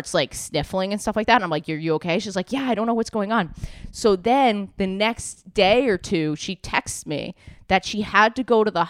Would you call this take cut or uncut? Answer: uncut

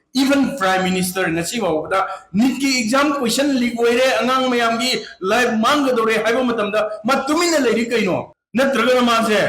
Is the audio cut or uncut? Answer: cut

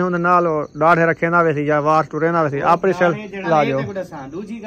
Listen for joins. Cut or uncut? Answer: cut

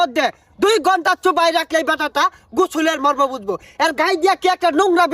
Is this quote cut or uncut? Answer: uncut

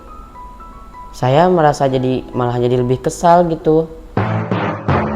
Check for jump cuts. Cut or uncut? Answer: cut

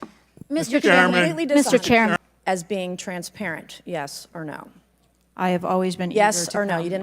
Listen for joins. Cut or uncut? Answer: cut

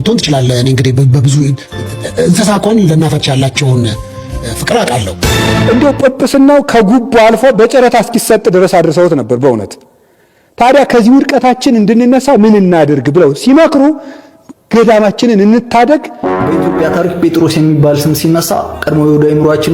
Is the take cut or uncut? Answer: cut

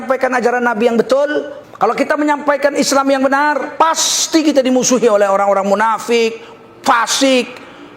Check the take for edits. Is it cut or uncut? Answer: cut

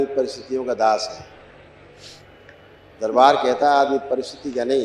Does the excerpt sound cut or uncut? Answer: uncut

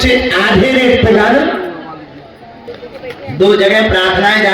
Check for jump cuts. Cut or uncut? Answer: cut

